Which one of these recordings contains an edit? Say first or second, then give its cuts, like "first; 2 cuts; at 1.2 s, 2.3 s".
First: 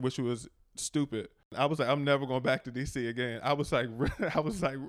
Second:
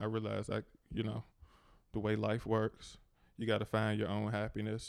first; 1 cut; at 1.5 s